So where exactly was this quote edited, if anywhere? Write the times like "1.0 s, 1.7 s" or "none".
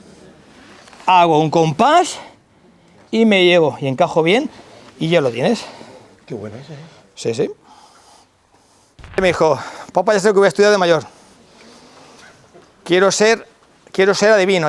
9.2 s